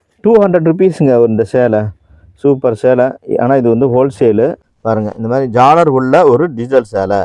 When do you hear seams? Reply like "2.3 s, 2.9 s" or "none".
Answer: 4.7 s